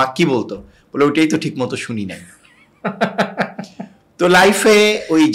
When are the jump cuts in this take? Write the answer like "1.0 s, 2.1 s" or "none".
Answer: none